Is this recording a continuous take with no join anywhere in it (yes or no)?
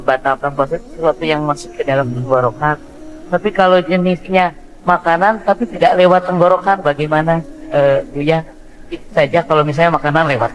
yes